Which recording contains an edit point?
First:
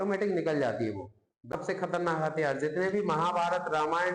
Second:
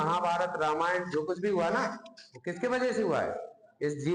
first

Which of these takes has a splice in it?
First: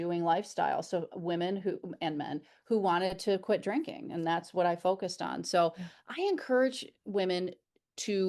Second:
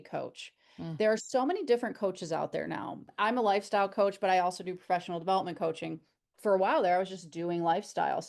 second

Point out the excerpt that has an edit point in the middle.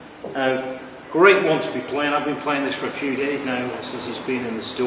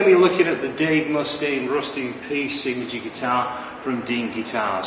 first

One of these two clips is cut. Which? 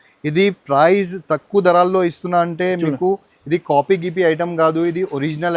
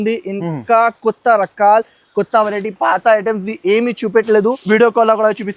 second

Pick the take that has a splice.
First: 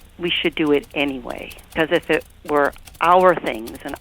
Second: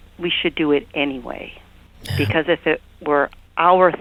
first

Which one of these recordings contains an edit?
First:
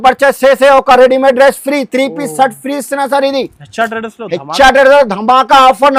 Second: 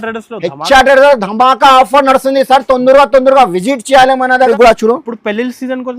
second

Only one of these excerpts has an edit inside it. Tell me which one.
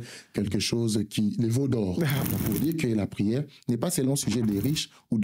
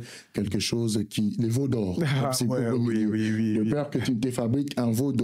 first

